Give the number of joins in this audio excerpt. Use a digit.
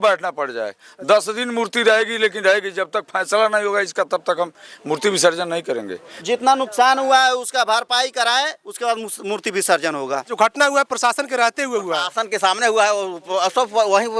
2